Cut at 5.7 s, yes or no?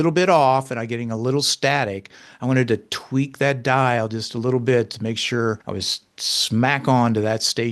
yes